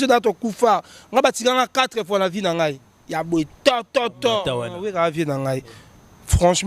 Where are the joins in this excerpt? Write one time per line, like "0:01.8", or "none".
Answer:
0:04.5